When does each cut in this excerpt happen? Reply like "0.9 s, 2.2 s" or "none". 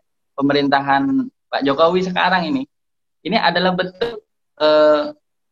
none